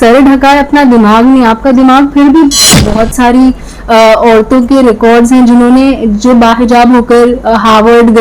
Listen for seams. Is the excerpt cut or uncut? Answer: cut